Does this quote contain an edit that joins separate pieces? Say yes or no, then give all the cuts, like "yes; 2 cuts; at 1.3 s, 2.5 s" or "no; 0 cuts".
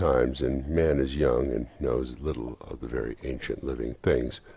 yes; 1 cut; at 3.2 s